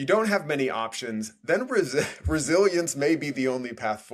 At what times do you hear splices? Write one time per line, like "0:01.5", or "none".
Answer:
none